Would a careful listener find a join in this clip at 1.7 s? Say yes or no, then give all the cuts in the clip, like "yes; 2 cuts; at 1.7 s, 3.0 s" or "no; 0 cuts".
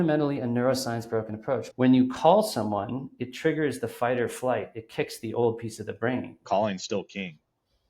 yes; 2 cuts; at 1.7 s, 6.4 s